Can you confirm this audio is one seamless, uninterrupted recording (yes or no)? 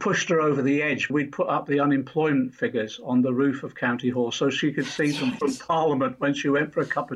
no